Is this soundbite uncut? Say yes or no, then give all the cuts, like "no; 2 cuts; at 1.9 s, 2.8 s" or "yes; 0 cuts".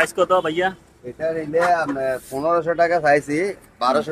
yes; 0 cuts